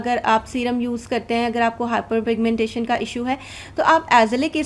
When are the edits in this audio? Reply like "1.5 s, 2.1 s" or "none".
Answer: none